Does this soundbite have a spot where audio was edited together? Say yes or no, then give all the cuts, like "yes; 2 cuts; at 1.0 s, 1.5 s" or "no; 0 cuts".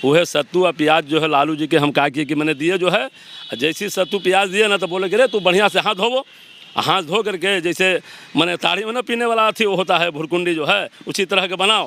no; 0 cuts